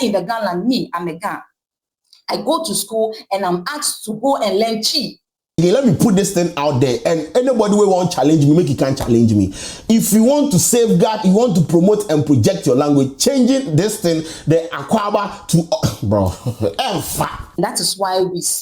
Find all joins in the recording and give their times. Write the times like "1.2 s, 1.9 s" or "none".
5.6 s, 17.6 s